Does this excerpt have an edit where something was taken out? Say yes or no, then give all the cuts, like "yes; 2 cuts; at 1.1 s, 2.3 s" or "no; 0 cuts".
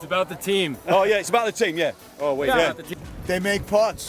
yes; 1 cut; at 2.9 s